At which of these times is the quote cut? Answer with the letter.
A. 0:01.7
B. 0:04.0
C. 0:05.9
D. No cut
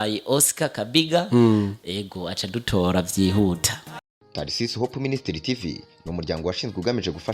B